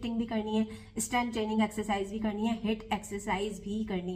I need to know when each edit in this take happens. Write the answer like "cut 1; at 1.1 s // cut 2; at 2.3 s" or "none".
none